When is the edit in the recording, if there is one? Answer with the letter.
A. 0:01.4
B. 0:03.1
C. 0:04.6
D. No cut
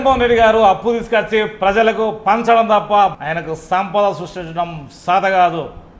B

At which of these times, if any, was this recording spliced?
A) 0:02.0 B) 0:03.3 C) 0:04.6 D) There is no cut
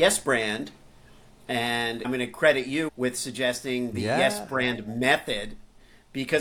A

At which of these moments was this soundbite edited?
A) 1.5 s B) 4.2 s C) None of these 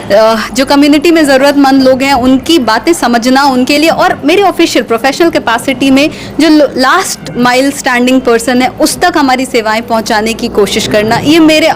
C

